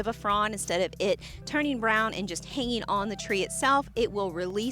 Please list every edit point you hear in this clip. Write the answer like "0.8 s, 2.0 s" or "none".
none